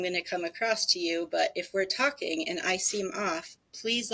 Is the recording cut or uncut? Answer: uncut